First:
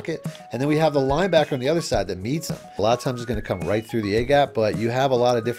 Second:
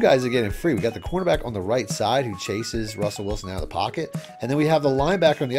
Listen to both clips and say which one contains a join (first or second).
first